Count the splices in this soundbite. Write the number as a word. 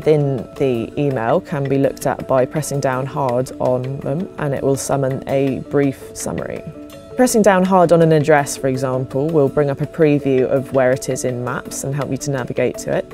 one